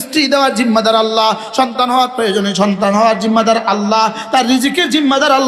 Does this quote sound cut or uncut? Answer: uncut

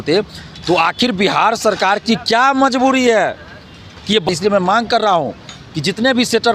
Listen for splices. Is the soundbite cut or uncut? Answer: cut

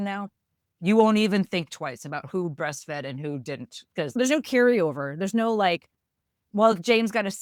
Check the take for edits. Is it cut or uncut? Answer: uncut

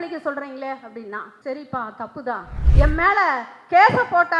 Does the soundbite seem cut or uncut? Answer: cut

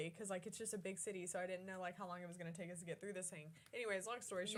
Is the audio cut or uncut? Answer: uncut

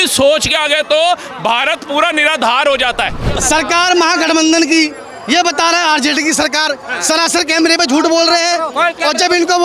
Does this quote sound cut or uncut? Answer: cut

